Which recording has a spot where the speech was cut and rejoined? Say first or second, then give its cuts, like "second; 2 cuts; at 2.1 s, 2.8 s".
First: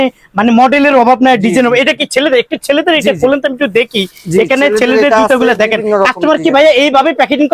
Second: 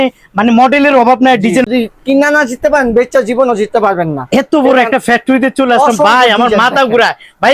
second; 1 cut; at 1.7 s